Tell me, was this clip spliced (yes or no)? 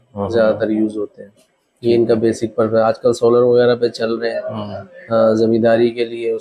no